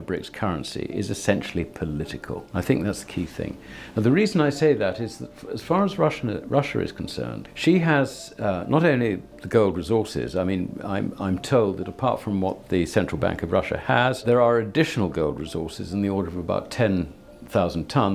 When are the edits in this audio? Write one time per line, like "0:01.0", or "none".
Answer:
0:02.4
0:07.4
0:14.2